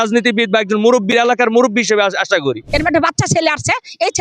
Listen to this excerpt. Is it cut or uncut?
cut